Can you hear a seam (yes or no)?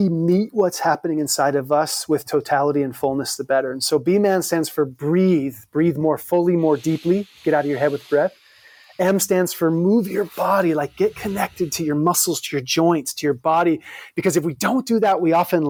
no